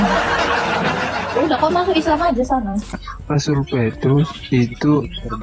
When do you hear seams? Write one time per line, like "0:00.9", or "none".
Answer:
0:03.1